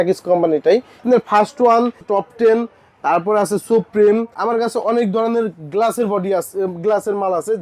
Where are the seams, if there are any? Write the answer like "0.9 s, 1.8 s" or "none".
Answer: 1.0 s, 2.0 s, 4.3 s